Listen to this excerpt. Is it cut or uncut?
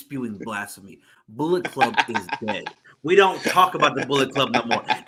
uncut